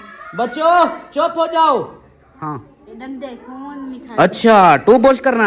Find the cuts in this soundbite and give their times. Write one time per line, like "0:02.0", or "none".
none